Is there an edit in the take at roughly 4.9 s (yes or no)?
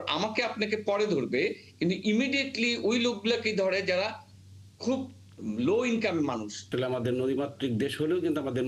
no